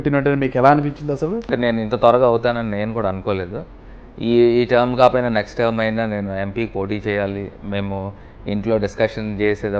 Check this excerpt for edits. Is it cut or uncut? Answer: cut